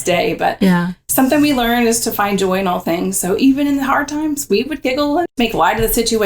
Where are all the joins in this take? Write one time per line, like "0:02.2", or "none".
0:05.3